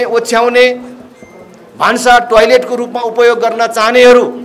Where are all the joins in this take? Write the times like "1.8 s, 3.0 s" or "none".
none